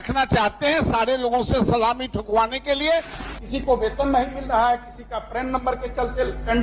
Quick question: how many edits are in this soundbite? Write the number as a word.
one